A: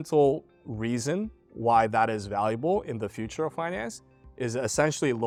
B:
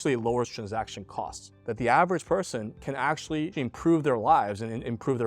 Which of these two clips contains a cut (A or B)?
B